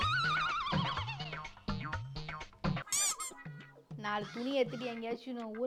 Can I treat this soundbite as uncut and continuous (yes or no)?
yes